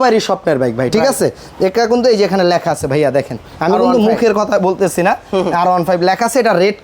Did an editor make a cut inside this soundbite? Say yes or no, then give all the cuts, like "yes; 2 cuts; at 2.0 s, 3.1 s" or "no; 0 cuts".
no; 0 cuts